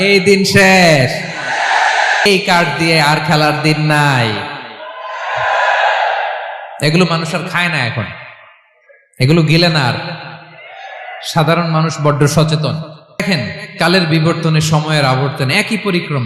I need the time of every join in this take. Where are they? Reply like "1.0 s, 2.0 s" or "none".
2.3 s, 13.2 s